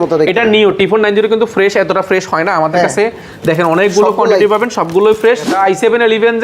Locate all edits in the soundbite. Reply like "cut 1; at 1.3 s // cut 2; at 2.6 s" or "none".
cut 1; at 5.5 s